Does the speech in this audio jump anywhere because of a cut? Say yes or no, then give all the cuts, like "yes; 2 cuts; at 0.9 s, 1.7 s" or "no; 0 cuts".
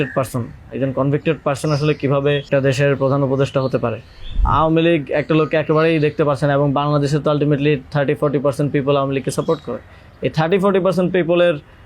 yes; 2 cuts; at 2.5 s, 4.4 s